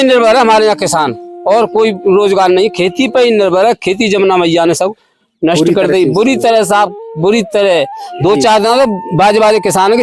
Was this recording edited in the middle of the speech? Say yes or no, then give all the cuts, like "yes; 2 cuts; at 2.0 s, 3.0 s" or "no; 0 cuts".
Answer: no; 0 cuts